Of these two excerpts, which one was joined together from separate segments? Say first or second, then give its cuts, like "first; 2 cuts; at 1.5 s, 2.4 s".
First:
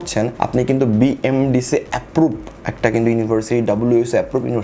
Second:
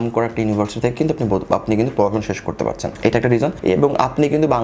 second; 1 cut; at 3.6 s